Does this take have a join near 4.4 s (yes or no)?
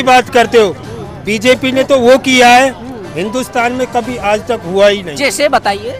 no